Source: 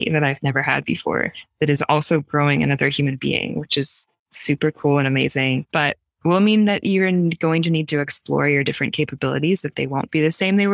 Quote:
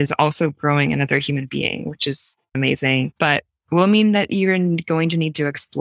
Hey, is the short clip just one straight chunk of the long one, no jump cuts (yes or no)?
no